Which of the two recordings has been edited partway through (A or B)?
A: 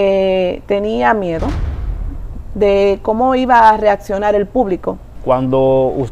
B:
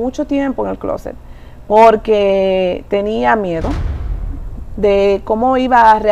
A